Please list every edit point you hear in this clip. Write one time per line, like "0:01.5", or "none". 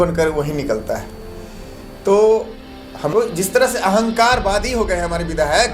0:03.1